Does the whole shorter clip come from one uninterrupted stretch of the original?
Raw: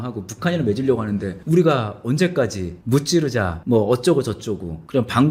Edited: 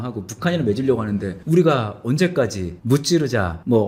yes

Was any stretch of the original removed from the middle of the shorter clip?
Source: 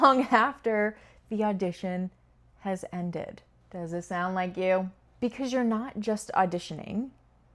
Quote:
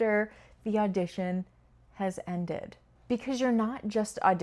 yes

